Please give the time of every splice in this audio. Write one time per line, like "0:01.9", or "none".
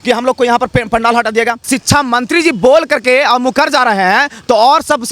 0:01.7